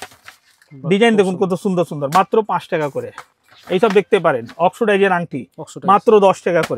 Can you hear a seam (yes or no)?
no